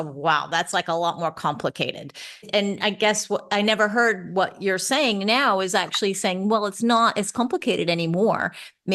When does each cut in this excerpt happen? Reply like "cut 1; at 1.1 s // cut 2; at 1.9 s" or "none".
cut 1; at 2.5 s